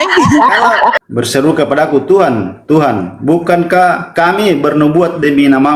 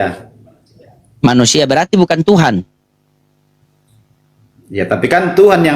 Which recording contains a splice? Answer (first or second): first